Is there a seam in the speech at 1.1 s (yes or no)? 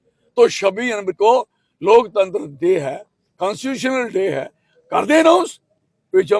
yes